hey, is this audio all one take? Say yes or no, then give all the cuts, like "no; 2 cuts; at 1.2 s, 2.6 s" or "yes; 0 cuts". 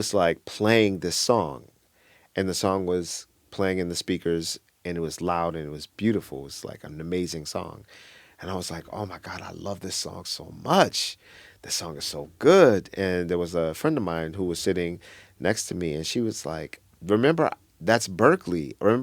yes; 0 cuts